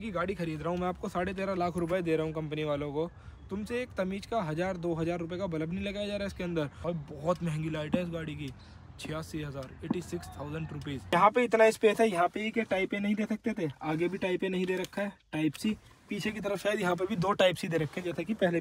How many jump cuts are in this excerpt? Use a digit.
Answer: 2